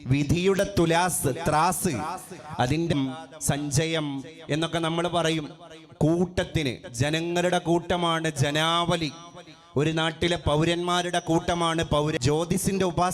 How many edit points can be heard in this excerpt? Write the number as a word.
two